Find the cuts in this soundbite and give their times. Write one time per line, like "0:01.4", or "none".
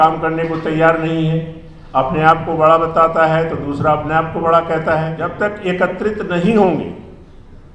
0:05.2